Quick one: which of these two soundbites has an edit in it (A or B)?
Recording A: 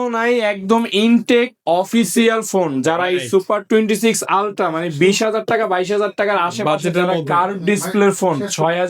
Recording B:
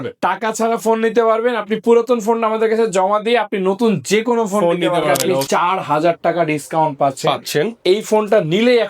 B